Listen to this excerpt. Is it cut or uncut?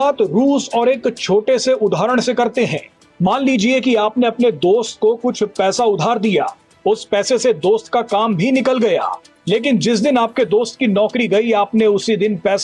uncut